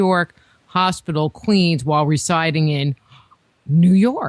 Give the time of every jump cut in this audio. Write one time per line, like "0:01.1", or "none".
none

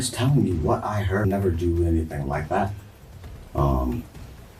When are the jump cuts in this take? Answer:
0:01.2

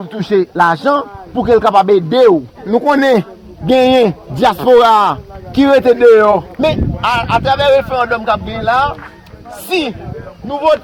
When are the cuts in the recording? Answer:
0:02.7
0:06.5

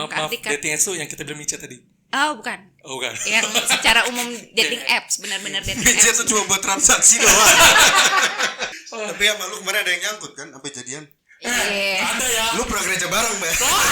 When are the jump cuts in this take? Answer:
0:08.8

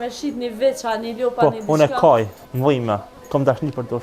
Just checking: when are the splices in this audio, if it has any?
0:02.8

